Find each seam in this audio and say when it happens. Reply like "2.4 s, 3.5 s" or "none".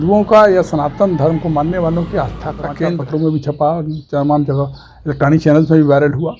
2.7 s